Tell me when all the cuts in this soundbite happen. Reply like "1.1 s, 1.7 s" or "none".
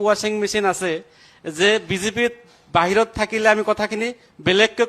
none